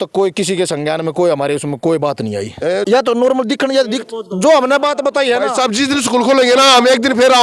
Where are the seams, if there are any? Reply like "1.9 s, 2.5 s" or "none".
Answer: 2.9 s